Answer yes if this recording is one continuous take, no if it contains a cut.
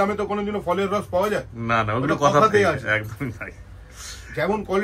yes